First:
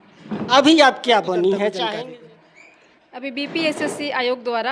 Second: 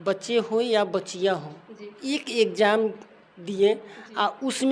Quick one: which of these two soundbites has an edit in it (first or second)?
first